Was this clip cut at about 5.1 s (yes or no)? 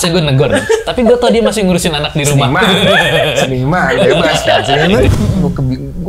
yes